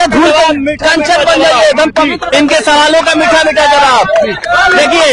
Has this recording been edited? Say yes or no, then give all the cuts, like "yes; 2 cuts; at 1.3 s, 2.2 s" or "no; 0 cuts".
no; 0 cuts